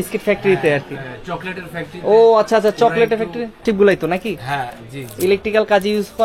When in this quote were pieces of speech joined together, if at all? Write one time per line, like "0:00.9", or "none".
0:03.6